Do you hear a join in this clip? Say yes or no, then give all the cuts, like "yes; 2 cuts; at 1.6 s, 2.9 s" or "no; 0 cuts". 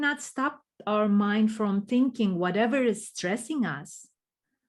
no; 0 cuts